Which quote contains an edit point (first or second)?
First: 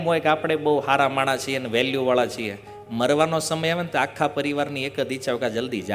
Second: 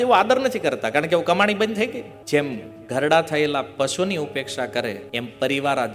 second